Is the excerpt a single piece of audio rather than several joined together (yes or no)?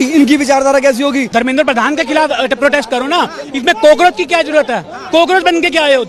no